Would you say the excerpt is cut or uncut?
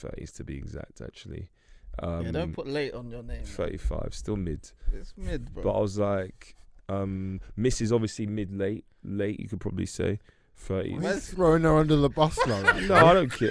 uncut